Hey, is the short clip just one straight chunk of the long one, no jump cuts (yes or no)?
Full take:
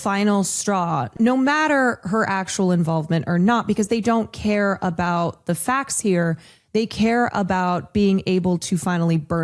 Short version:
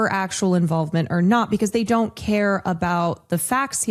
yes